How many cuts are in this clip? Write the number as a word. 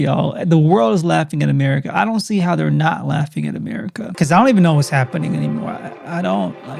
one